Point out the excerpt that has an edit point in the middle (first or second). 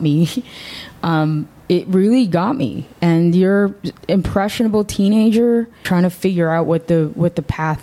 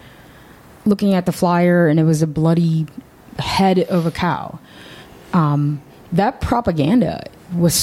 first